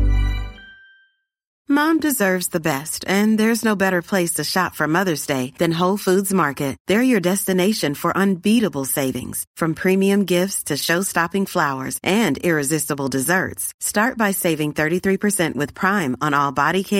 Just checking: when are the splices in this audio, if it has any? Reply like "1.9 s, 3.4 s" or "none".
1.5 s